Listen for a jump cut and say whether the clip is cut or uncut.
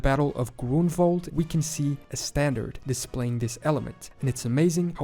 cut